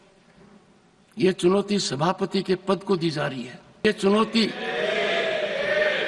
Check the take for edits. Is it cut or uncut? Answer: cut